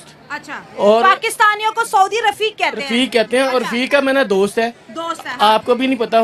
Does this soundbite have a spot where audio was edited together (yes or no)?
no